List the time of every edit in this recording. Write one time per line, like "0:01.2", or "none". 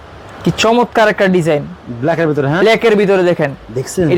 none